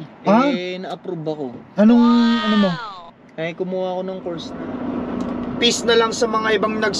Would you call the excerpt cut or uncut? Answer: cut